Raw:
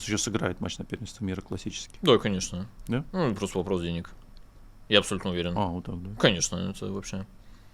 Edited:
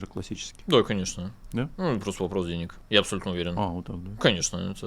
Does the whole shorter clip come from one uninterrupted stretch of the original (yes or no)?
no